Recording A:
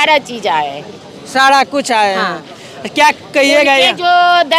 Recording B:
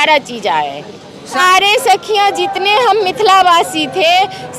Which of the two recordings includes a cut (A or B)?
B